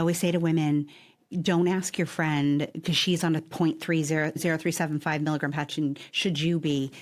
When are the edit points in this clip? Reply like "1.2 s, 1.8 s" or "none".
4.4 s